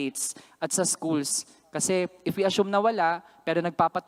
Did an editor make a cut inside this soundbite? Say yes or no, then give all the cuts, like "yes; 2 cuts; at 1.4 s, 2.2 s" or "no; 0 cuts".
no; 0 cuts